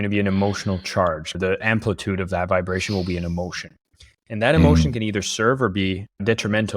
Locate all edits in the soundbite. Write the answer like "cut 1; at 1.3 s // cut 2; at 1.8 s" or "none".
cut 1; at 1.3 s